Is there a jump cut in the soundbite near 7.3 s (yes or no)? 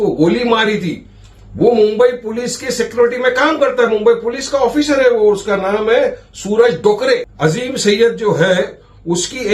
yes